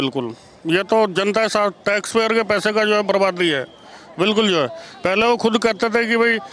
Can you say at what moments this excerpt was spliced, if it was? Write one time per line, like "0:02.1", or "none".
none